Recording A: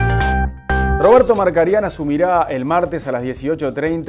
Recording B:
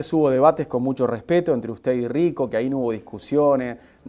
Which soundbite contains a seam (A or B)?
A